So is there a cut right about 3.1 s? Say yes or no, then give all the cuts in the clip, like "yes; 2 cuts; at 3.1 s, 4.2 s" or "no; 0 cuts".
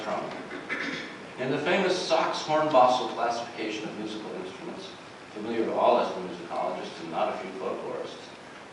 yes; 1 cut; at 3.1 s